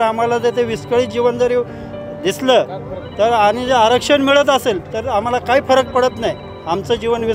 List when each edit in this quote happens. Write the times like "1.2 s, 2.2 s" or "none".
none

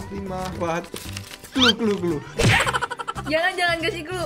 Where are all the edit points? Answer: none

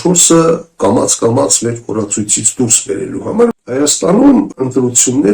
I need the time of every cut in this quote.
3.5 s, 4.5 s

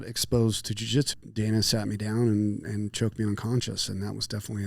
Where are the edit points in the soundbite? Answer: 1.1 s

